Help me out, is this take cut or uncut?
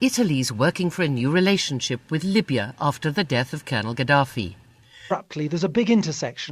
uncut